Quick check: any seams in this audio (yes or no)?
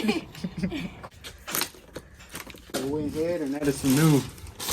yes